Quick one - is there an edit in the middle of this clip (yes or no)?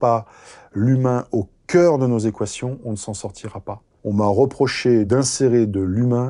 yes